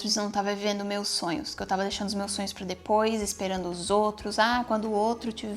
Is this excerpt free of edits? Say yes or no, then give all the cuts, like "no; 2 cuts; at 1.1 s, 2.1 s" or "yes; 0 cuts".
yes; 0 cuts